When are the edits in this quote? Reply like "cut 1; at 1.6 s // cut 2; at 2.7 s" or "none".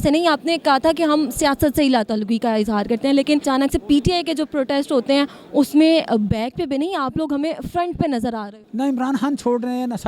cut 1; at 3.4 s // cut 2; at 8.6 s

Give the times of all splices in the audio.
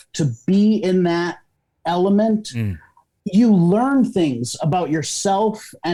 none

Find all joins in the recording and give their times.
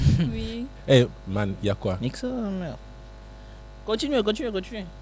none

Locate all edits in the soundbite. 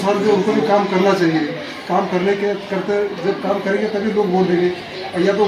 none

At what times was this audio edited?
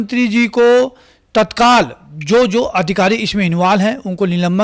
none

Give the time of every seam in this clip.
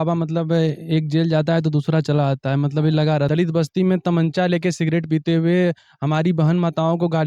cut 1; at 3.3 s

